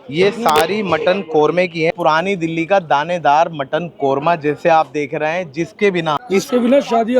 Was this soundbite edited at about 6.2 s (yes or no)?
yes